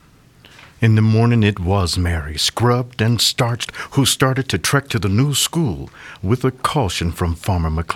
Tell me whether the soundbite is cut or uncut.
uncut